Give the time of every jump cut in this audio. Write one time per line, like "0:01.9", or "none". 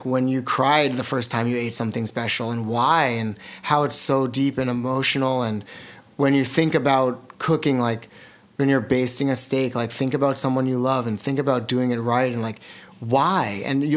none